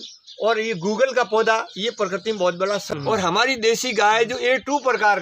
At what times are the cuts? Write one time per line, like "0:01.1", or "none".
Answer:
0:02.9